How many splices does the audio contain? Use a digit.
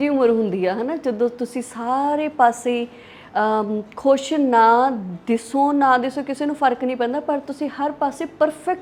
0